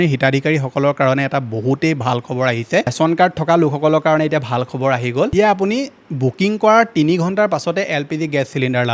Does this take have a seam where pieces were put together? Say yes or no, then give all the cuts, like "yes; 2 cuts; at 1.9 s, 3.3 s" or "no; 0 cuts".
yes; 2 cuts; at 2.9 s, 5.3 s